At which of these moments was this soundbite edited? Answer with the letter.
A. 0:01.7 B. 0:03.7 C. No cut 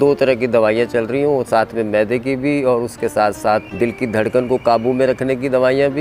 B